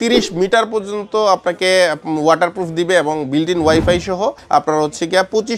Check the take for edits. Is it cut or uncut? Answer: cut